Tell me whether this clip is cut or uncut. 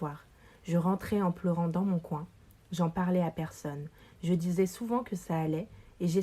uncut